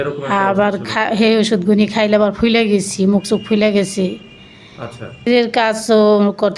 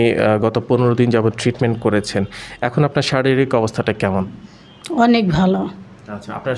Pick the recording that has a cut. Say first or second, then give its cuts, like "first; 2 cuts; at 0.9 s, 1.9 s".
first; 1 cut; at 5.3 s